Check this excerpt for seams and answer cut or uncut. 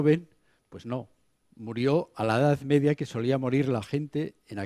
cut